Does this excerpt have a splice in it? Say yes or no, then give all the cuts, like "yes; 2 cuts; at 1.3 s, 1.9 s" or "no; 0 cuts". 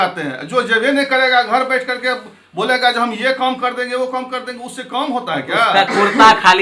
no; 0 cuts